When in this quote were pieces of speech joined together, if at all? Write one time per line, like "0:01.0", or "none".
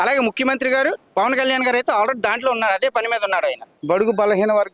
0:03.7